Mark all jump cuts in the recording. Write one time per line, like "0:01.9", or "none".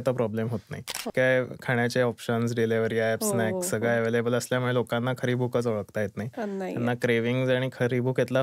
0:01.1